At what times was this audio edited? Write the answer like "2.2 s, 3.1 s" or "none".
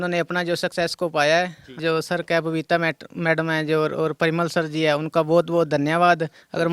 1.8 s